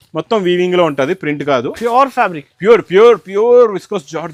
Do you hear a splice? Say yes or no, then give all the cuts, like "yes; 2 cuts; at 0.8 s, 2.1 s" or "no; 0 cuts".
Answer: no; 0 cuts